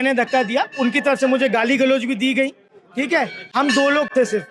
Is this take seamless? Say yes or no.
yes